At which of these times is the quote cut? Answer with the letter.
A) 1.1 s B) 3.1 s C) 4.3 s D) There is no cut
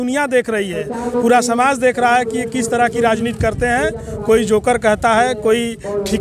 D